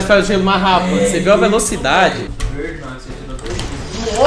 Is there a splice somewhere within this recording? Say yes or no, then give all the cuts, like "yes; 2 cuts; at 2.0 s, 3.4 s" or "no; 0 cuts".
yes; 1 cut; at 2.2 s